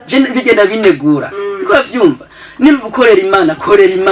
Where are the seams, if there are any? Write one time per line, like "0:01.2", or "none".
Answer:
none